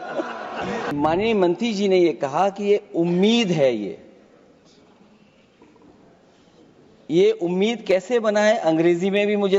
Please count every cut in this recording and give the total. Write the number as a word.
one